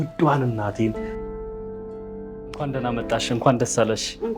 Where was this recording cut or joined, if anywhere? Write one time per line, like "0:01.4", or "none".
0:01.0
0:02.7